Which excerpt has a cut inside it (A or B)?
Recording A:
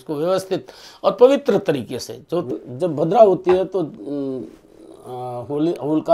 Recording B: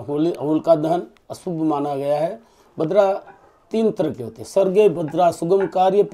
A